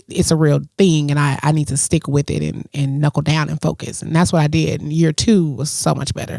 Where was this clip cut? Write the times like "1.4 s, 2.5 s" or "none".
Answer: none